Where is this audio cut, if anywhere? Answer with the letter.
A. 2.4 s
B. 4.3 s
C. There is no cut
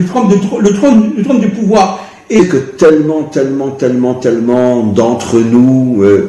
A